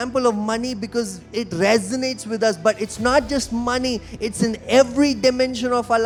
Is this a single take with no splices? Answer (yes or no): yes